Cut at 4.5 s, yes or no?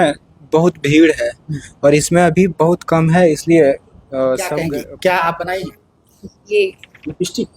yes